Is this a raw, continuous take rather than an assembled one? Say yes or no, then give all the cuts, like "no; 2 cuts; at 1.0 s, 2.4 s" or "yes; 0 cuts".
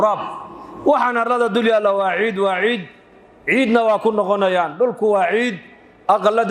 yes; 0 cuts